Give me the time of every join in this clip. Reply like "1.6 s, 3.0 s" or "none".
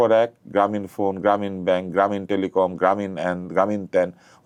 none